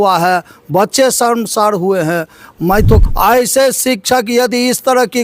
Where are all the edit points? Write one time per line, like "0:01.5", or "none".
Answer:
0:03.0